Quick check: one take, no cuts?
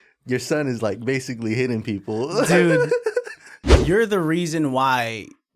no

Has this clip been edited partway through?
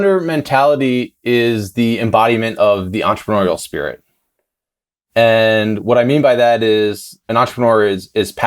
yes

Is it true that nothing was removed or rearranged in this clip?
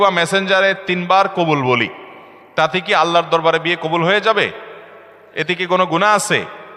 yes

